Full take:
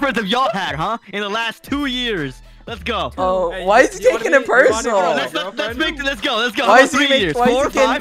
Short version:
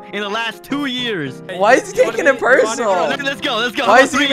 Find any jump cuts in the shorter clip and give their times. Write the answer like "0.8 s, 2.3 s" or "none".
1.5 s, 3.2 s